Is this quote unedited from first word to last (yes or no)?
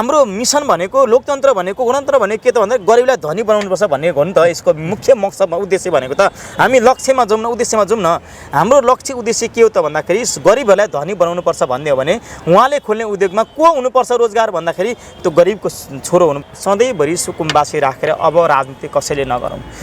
no